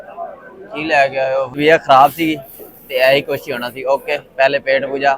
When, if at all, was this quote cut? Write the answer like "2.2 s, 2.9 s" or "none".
1.6 s